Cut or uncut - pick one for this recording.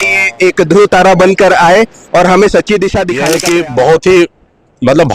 cut